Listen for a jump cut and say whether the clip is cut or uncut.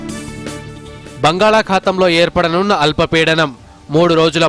uncut